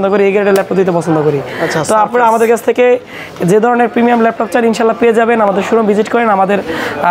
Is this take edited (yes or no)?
no